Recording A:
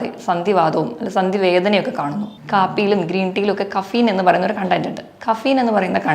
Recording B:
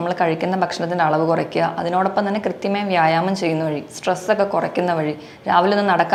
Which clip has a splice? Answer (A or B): A